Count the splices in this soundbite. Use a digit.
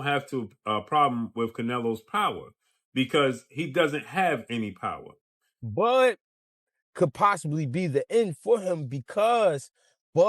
1